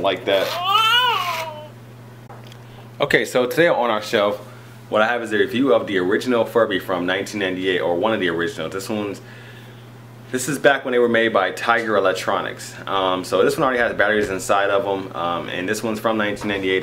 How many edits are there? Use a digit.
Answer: 0